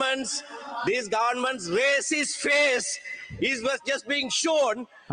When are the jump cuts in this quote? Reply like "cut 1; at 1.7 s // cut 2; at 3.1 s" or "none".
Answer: none